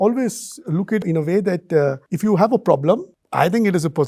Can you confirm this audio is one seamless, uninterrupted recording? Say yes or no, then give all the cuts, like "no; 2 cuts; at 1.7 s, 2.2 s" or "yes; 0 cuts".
no; 1 cut; at 1.0 s